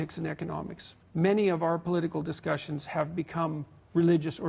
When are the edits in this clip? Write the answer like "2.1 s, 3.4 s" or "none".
1.0 s